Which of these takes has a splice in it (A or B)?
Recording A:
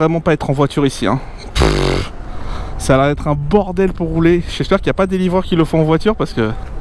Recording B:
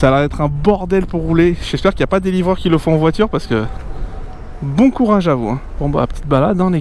B